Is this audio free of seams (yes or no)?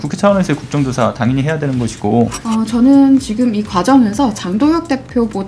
no